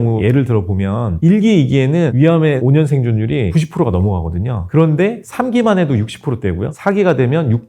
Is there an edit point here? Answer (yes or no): no